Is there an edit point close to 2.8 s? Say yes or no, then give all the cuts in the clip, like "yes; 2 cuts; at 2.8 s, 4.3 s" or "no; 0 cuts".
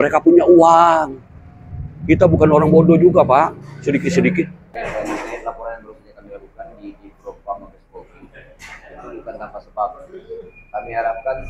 no; 1 cut; at 4.7 s